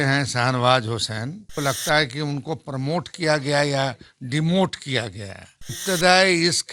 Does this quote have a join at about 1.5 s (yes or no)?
yes